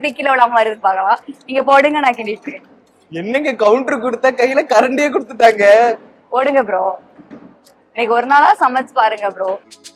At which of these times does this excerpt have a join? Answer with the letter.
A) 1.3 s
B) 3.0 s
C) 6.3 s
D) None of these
D